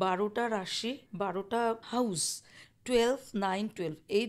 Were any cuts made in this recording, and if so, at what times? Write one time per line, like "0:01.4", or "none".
0:01.0
0:01.8